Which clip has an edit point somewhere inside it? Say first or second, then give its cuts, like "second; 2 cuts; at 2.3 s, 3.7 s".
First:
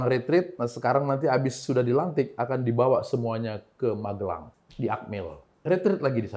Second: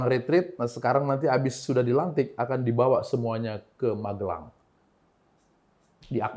first; 1 cut; at 4.6 s